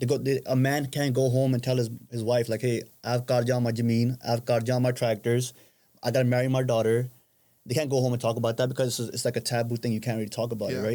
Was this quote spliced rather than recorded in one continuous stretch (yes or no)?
no